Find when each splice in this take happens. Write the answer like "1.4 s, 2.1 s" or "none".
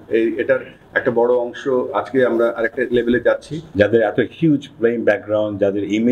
3.6 s